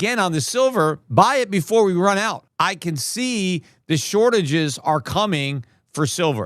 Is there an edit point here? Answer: yes; 2 cuts; at 1.0 s, 2.4 s

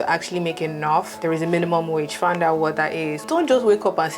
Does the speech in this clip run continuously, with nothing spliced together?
no; 1 cut; at 3.2 s

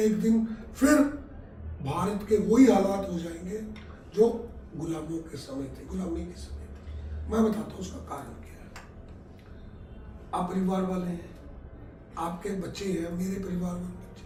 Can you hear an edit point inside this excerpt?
no; 0 cuts

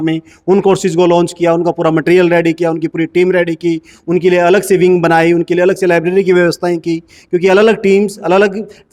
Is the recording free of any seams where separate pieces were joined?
yes; 0 cuts

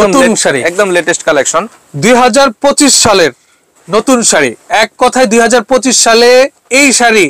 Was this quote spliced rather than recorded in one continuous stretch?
no; 0 cuts

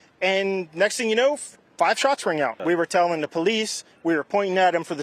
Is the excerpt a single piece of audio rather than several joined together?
no; 1 cut; at 2.6 s

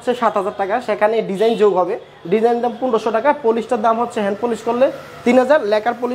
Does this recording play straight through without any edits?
yes; 0 cuts

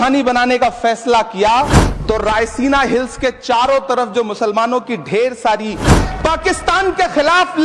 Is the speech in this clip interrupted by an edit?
yes; 2 cuts; at 1.9 s, 6.0 s

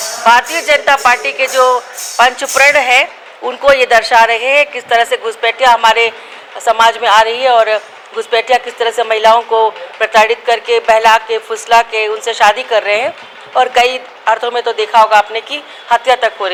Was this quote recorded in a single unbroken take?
yes; 0 cuts

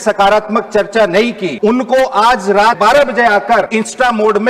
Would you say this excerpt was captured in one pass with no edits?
no; 3 cuts; at 1.5 s, 2.8 s, 3.7 s

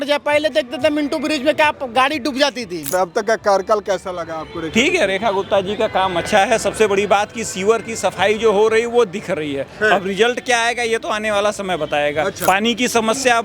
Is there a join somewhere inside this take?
yes; 2 cuts; at 2.9 s, 12.4 s

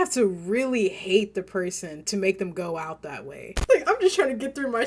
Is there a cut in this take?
yes; 1 cut; at 3.6 s

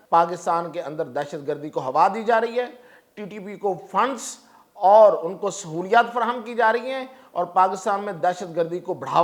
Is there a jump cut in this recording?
no; 0 cuts

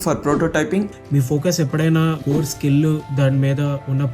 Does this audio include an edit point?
yes; 3 cuts; at 0.9 s, 2.2 s, 3.1 s

